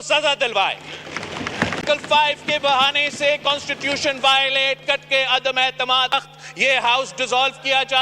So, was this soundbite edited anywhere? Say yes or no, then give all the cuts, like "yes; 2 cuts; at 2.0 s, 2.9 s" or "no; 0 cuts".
yes; 2 cuts; at 1.8 s, 6.1 s